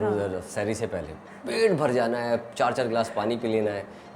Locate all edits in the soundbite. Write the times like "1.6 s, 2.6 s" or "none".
none

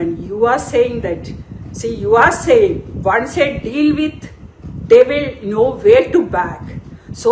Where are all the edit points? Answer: none

